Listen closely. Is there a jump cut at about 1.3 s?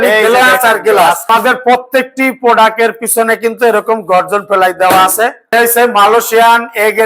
yes; 2 cuts; at 1.3 s, 5.4 s

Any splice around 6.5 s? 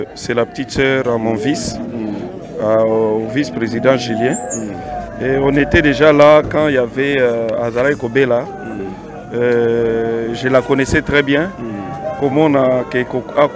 no; 0 cuts

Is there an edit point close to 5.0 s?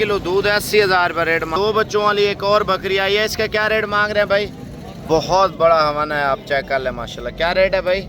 yes; 2 cuts; at 1.5 s, 5.0 s

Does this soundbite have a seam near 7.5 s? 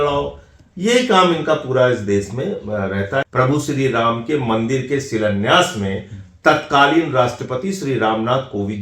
no; 1 cut; at 3.2 s

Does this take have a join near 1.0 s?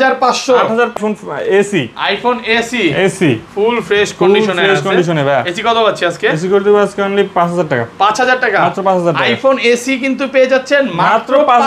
yes; 1 cut; at 1.0 s

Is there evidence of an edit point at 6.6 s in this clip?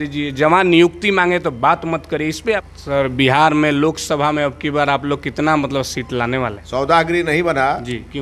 yes; 2 cuts; at 2.6 s, 6.6 s

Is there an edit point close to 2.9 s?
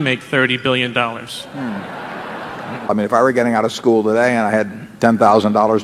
yes; 1 cut; at 2.9 s

